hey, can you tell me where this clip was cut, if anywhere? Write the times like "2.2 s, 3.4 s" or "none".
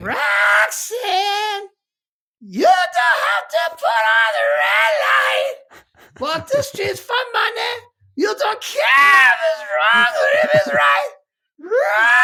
none